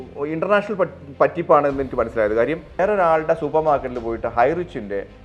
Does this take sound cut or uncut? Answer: cut